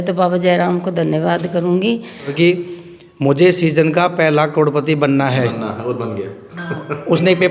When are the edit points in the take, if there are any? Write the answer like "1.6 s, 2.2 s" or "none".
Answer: 2.3 s